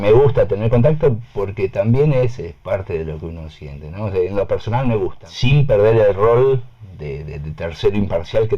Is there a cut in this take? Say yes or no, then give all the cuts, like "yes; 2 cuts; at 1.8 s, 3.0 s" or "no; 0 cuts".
yes; 1 cut; at 5.3 s